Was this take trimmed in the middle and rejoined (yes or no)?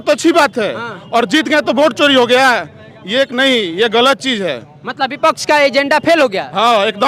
no